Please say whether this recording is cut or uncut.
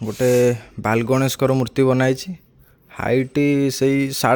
uncut